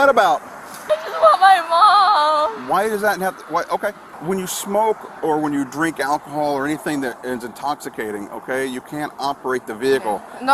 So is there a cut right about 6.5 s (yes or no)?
no